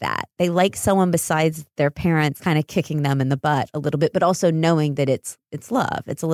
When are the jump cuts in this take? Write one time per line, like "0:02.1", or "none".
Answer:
0:02.4